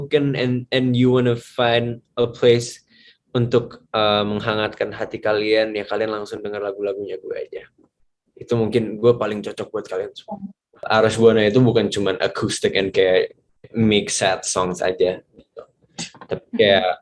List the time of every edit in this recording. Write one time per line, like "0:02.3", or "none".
0:10.8